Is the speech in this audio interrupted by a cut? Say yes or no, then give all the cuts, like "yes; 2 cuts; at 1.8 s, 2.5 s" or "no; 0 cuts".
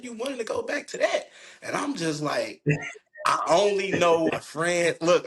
yes; 1 cut; at 4.4 s